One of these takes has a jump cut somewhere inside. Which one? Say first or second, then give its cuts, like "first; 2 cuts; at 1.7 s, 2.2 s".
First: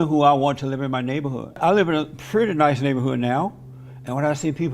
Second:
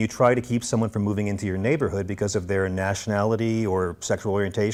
first; 1 cut; at 1.6 s